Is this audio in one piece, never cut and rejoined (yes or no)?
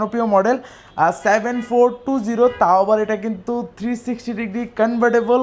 yes